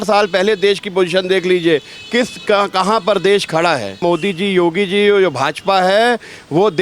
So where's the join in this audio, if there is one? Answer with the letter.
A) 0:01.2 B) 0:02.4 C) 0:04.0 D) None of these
C